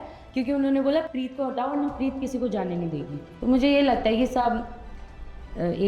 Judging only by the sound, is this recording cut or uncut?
cut